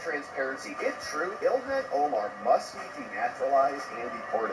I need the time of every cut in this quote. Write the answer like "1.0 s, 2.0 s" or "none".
none